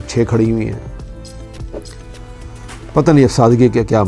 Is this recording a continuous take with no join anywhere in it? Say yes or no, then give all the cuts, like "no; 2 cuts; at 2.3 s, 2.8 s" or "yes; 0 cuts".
no; 1 cut; at 1.6 s